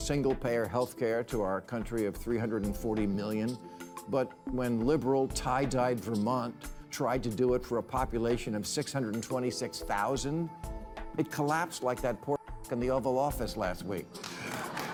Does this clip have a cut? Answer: no; 0 cuts

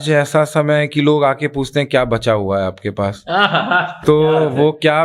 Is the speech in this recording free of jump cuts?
yes; 0 cuts

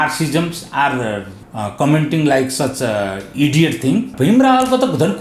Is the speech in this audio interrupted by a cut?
yes; 2 cuts; at 1.4 s, 4.1 s

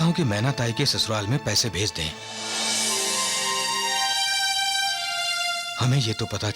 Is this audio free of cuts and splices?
yes; 0 cuts

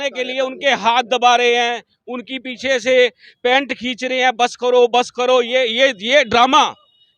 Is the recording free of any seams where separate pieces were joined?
yes; 0 cuts

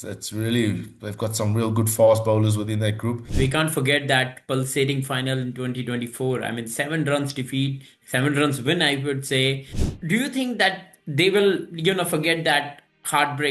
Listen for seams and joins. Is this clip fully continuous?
no; 2 cuts; at 3.3 s, 9.7 s

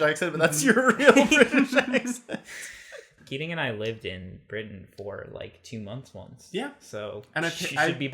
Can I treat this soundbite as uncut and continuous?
no; 1 cut; at 3.1 s

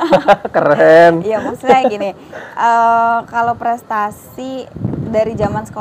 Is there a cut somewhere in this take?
no; 0 cuts

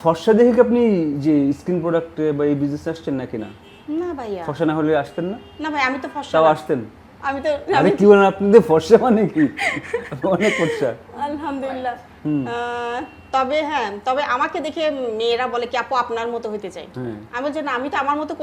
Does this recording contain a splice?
no; 0 cuts

